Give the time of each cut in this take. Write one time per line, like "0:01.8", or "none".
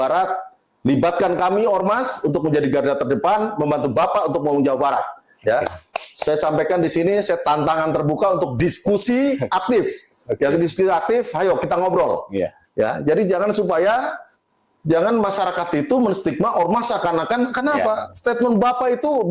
none